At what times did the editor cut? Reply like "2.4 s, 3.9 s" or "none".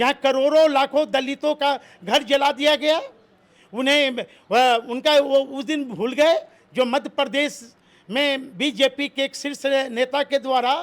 none